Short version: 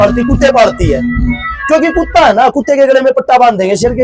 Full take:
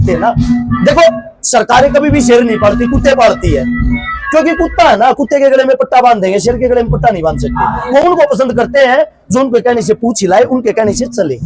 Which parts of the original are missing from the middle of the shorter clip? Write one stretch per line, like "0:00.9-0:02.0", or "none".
none